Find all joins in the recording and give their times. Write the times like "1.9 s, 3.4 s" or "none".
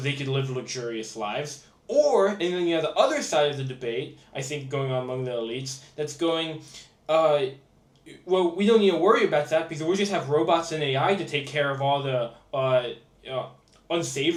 none